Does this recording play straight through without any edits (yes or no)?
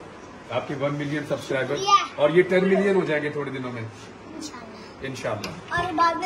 yes